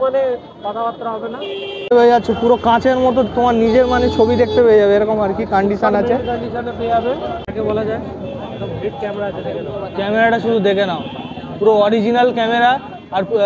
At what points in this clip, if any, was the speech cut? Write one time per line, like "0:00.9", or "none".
0:01.9
0:07.5